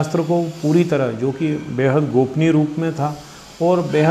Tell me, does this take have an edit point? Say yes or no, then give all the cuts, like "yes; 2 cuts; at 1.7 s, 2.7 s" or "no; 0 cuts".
no; 0 cuts